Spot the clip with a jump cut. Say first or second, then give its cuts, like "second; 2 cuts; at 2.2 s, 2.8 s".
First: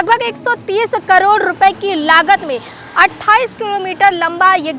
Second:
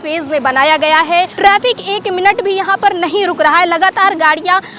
second; 1 cut; at 1.3 s